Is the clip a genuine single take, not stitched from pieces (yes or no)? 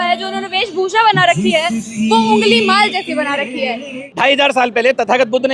no